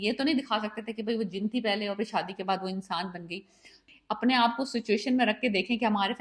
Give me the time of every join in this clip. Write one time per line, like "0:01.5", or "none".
0:03.9